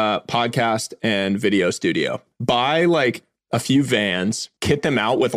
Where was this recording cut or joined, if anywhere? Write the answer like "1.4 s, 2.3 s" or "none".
2.2 s, 4.5 s